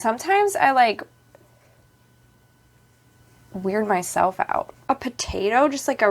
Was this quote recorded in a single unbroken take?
no; 1 cut; at 4.8 s

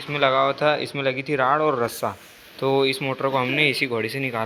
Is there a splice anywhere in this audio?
no; 0 cuts

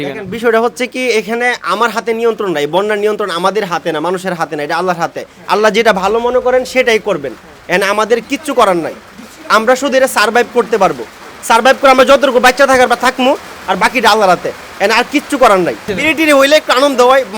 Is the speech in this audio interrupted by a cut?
no; 0 cuts

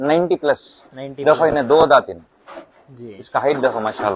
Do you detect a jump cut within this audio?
no; 0 cuts

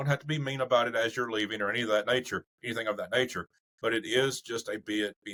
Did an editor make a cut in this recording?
no; 0 cuts

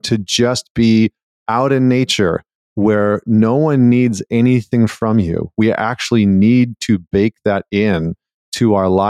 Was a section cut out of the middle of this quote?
no; 0 cuts

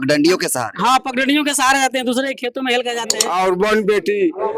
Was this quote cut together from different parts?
yes; 1 cut; at 3.2 s

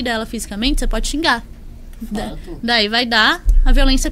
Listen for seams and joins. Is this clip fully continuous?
yes; 0 cuts

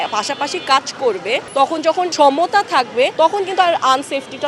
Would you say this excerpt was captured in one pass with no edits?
no; 2 cuts; at 1.8 s, 3.1 s

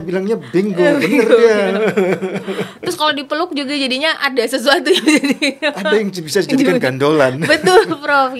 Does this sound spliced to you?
no; 0 cuts

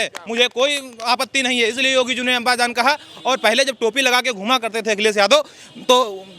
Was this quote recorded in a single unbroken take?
yes; 0 cuts

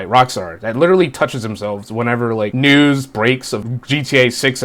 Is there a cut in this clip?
yes; 2 cuts; at 2.5 s, 3.6 s

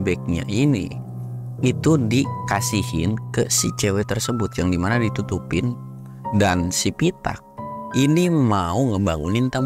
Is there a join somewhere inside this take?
no; 0 cuts

